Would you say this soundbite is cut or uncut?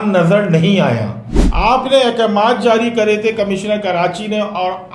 uncut